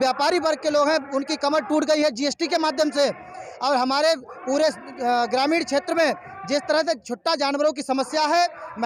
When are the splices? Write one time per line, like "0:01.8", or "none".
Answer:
none